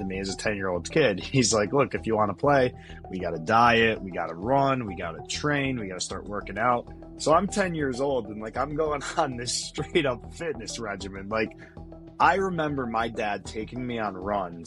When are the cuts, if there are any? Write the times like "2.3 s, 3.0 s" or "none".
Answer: none